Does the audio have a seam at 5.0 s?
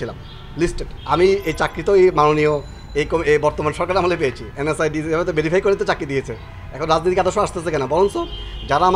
no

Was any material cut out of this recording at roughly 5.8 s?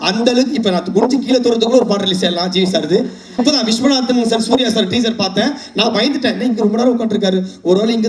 no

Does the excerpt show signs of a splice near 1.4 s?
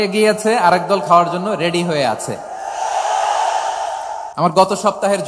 no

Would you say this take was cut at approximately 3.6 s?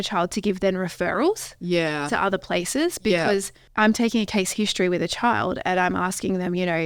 yes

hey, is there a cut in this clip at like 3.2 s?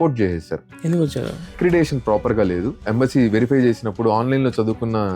no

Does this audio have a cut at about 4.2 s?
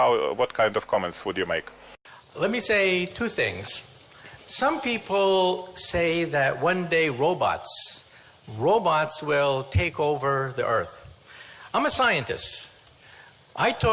no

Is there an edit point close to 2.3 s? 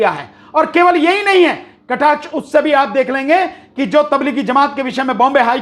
no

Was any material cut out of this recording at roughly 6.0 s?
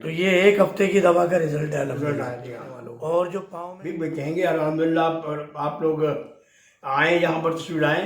no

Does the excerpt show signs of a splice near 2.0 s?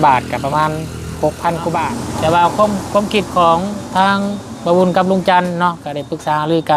yes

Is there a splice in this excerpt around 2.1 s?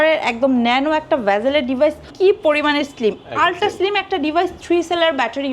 yes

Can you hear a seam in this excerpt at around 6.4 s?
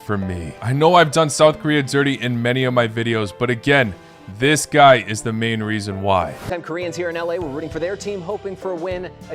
yes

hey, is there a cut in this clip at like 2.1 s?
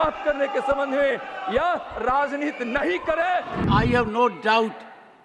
no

